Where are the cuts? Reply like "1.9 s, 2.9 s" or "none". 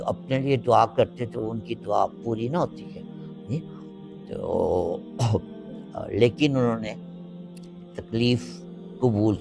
none